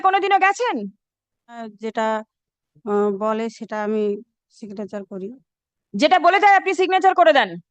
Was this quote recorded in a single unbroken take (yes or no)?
no